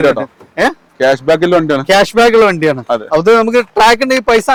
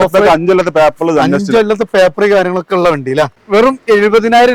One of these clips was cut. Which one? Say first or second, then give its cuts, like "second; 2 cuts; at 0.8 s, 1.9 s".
second; 1 cut; at 3.4 s